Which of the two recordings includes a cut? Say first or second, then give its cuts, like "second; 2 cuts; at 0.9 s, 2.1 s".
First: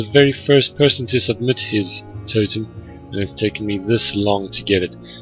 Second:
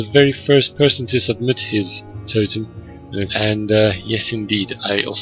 first; 1 cut; at 3.3 s